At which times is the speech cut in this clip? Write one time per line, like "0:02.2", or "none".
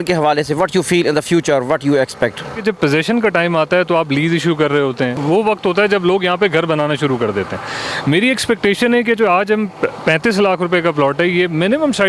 0:02.6
0:05.2